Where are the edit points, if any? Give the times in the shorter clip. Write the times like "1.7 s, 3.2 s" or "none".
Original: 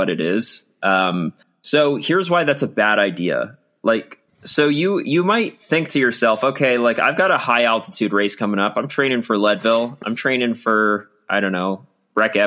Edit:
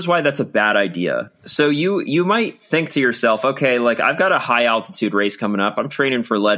1.4 s